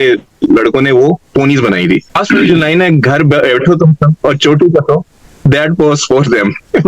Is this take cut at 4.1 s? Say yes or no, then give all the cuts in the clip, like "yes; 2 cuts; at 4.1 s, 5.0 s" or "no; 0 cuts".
no; 1 cut; at 2.1 s